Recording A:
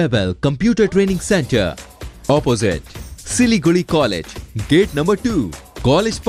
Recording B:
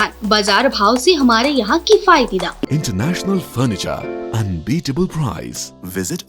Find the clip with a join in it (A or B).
B